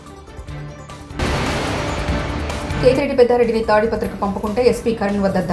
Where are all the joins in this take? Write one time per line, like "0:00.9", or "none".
0:00.9
0:02.8

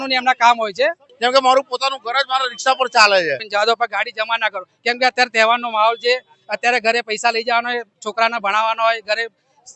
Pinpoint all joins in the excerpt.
0:01.1
0:03.4

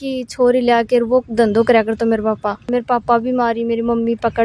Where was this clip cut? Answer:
0:02.7

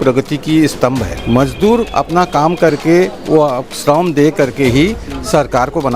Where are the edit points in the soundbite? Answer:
0:01.1

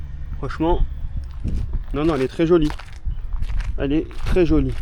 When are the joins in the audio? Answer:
none

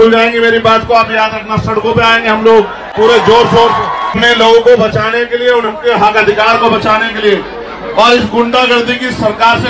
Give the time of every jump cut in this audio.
0:02.8
0:04.2

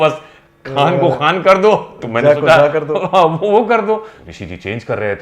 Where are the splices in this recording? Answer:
0:04.1

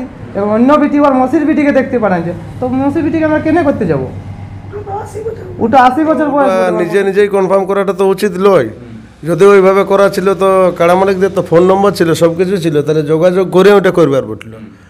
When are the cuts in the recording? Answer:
0:06.5

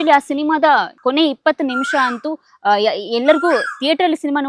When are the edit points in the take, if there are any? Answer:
none

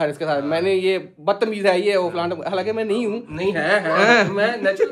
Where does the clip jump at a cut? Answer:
none

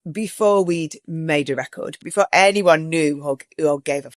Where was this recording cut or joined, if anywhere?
0:02.0

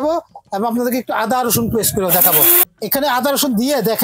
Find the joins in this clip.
0:02.6

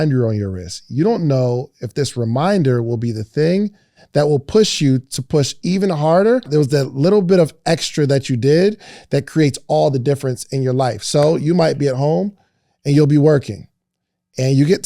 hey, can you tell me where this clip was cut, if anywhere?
0:06.5

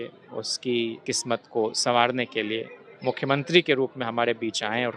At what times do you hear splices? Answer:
0:01.0

